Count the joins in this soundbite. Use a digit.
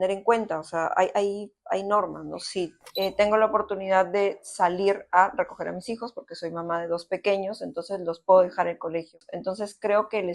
2